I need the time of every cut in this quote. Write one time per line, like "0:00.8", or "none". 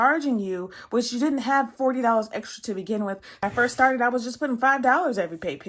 0:03.4

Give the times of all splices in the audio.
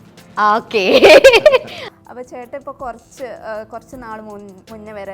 0:01.8

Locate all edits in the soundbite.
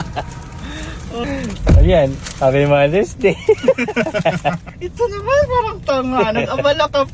0:01.2
0:04.7

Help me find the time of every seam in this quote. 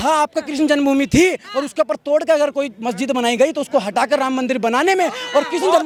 none

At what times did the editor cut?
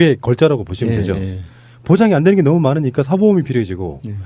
0:01.0

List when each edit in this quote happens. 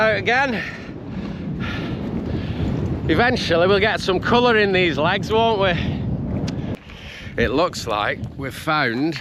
0:06.7

